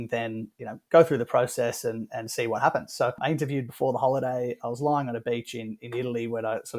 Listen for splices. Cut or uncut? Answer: cut